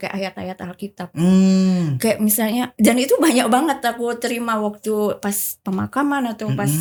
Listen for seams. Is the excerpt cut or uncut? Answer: uncut